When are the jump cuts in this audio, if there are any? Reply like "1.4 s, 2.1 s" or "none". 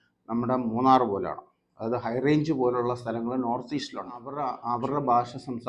4.4 s